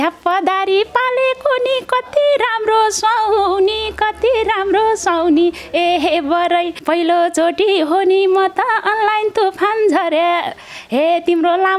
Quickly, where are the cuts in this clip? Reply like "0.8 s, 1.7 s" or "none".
6.8 s

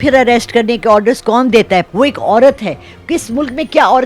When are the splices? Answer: 1.9 s

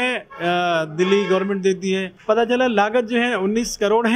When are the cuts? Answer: 2.1 s

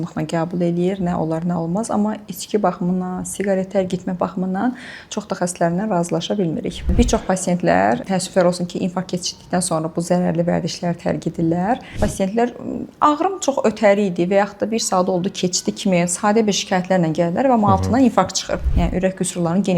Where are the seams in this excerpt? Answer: 6.9 s, 8.0 s, 11.9 s, 18.7 s

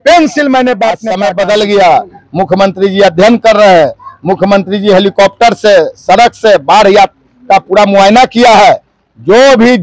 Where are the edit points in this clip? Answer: 1.1 s

